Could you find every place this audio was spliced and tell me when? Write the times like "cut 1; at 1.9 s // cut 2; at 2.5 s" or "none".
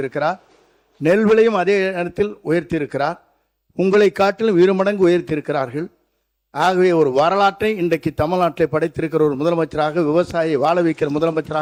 none